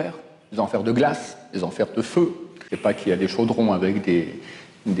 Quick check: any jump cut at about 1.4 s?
no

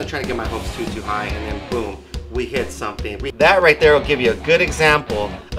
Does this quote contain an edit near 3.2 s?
yes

